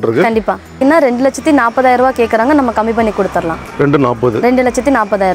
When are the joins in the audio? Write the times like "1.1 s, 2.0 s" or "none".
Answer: 0.8 s, 3.6 s

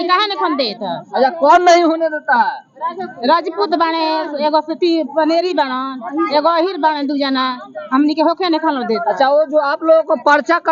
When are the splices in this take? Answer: none

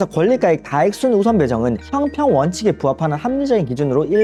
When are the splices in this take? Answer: none

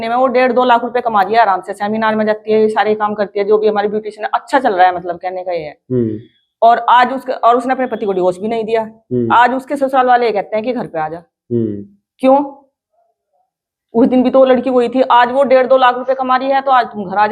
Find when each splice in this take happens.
none

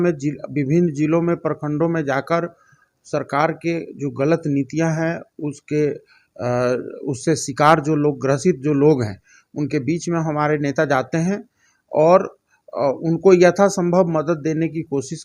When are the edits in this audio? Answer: none

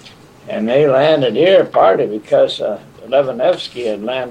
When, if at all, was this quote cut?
2.9 s

